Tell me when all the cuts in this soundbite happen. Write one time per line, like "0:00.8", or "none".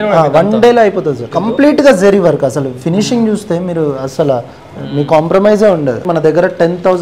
0:01.3
0:06.0